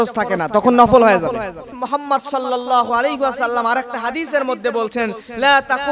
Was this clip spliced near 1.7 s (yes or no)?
yes